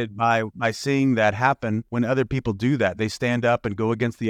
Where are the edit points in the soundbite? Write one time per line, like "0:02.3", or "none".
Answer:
0:01.8